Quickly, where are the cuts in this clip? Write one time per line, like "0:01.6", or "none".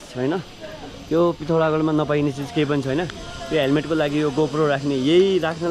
none